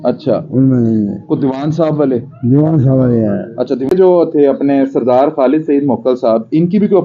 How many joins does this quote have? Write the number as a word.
one